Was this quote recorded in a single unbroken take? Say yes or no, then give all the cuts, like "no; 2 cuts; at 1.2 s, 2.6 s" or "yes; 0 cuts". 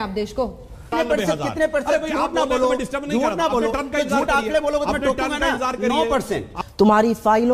no; 2 cuts; at 0.9 s, 6.5 s